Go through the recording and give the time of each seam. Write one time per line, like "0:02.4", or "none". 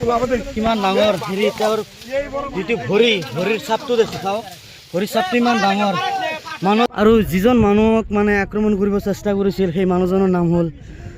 0:06.9